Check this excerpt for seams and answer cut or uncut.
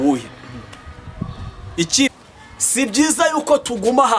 cut